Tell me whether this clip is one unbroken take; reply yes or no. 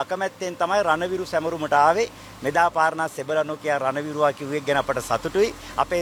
yes